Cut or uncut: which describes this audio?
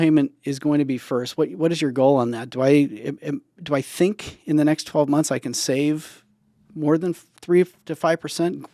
uncut